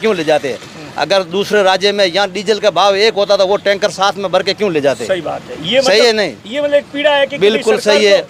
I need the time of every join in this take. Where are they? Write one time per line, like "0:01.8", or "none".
none